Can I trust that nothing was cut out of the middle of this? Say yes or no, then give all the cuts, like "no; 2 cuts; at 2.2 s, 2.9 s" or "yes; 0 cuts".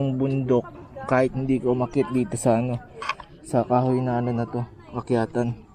yes; 0 cuts